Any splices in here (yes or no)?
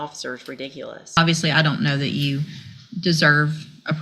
yes